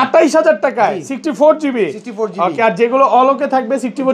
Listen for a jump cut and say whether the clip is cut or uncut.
uncut